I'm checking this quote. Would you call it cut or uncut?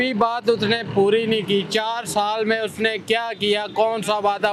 uncut